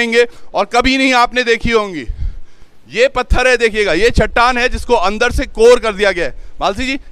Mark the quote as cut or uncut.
uncut